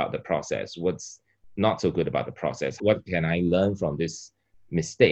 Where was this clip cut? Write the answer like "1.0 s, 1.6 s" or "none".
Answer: none